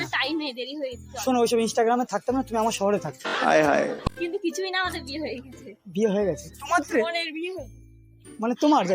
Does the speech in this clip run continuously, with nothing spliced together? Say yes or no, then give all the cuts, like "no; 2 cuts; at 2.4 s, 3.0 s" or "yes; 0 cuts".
no; 1 cut; at 4.0 s